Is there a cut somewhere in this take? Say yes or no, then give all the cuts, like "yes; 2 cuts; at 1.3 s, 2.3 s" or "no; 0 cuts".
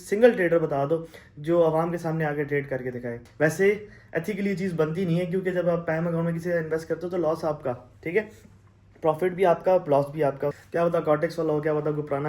yes; 2 cuts; at 3.2 s, 10.6 s